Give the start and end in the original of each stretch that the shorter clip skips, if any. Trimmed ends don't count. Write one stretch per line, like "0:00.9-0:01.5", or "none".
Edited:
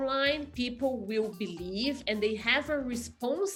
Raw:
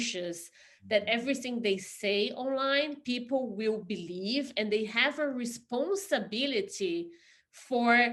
none